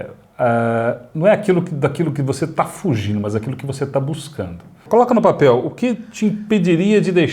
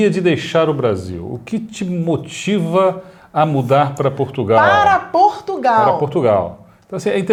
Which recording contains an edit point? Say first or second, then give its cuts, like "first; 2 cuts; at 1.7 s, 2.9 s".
first; 1 cut; at 4.8 s